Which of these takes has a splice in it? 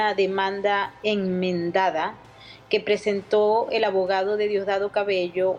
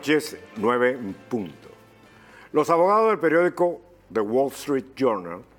first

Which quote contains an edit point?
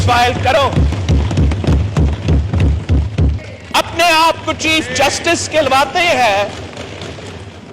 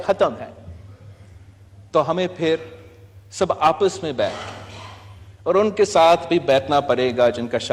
first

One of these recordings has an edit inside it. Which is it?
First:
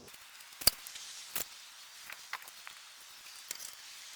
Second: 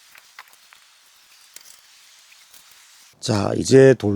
second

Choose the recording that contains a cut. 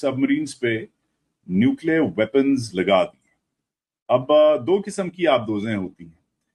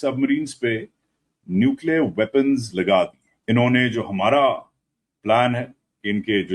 second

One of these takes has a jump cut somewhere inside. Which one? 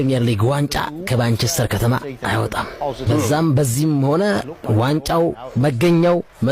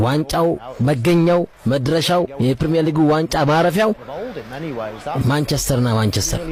first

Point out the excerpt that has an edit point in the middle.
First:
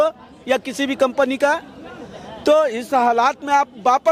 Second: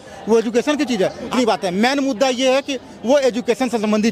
second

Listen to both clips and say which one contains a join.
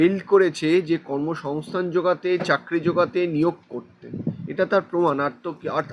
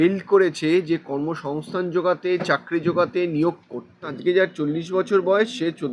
second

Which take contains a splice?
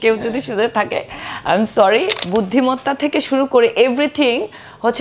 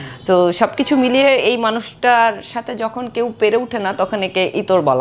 first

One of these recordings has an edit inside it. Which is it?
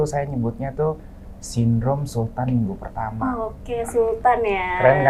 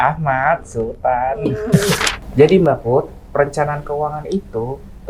second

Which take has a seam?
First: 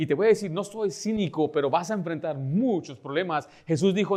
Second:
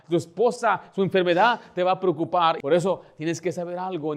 second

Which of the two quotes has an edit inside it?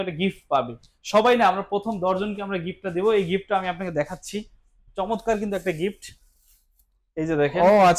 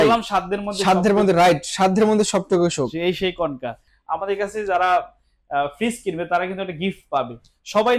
second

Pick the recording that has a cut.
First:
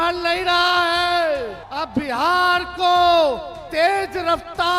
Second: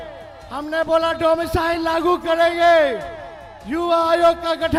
first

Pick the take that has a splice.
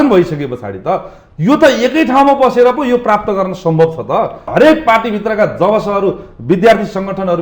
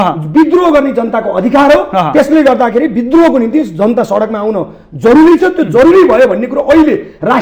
first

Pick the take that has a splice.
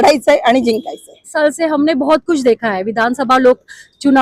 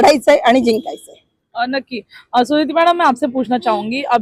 first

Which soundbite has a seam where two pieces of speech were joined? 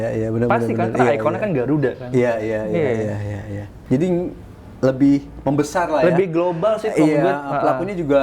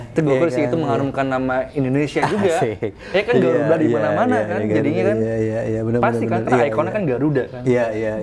first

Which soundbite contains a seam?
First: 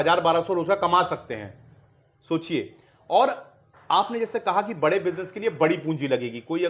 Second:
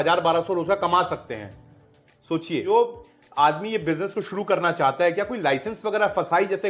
second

